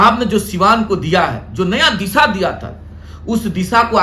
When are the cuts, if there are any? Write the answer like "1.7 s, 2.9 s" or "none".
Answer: none